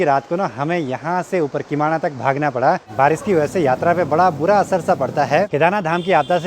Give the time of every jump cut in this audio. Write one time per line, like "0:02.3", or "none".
0:02.9
0:05.5

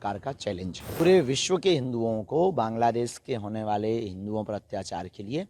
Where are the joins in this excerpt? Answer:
0:01.0

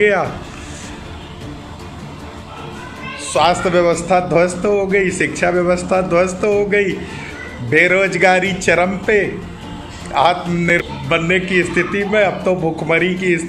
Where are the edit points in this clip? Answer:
0:10.8

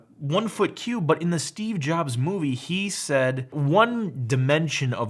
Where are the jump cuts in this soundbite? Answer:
0:03.6

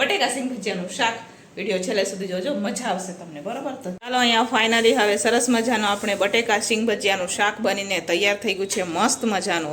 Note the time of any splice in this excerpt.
0:04.0

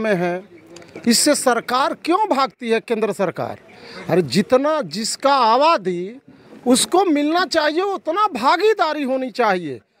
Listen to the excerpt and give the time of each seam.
none

